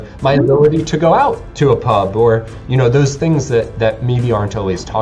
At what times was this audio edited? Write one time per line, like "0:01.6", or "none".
none

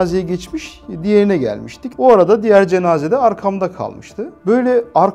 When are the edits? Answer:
0:01.8
0:04.4

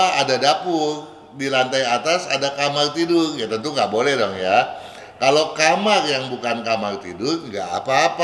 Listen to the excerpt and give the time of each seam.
none

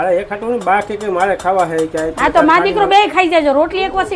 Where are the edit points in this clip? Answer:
none

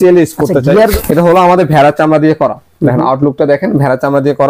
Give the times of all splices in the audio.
0:00.9

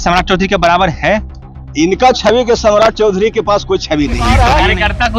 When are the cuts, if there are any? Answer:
0:04.3

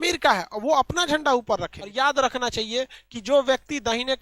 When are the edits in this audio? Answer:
0:01.8

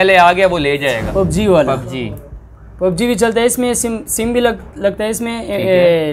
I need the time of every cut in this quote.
0:01.1

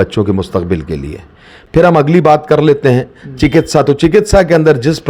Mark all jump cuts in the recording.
none

